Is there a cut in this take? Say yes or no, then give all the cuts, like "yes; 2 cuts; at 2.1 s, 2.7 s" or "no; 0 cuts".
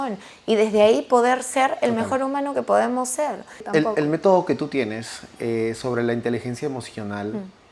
yes; 1 cut; at 3.6 s